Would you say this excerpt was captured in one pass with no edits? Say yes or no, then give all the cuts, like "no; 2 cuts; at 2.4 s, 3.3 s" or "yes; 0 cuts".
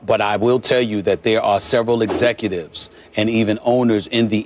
yes; 0 cuts